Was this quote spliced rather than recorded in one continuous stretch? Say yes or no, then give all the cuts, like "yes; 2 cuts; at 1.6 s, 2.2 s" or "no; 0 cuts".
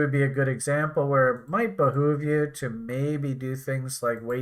no; 0 cuts